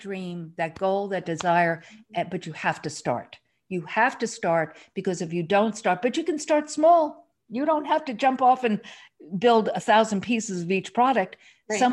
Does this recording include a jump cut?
no; 0 cuts

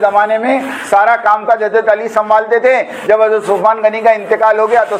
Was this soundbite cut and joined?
no; 0 cuts

